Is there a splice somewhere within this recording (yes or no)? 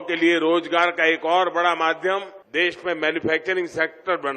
yes